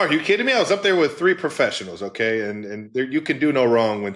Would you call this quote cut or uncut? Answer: uncut